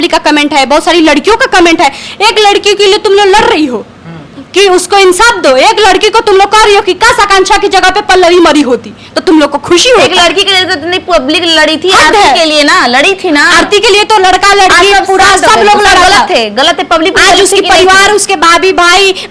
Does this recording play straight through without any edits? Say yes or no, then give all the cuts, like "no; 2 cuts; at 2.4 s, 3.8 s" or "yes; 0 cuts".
yes; 0 cuts